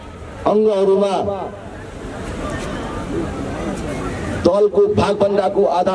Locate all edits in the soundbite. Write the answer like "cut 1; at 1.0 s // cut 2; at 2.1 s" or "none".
none